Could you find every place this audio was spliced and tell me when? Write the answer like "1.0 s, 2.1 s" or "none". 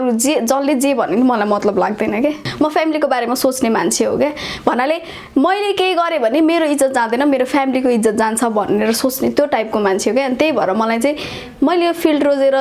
2.5 s